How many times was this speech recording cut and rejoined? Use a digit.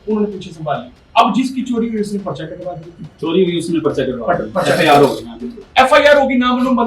2